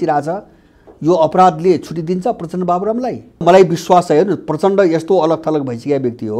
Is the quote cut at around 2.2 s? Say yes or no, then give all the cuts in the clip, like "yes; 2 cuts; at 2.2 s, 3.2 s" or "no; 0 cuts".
no; 1 cut; at 3.4 s